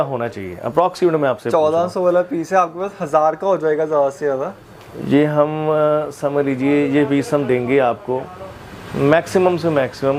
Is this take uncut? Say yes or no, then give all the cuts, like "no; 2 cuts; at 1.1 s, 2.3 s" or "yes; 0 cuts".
yes; 0 cuts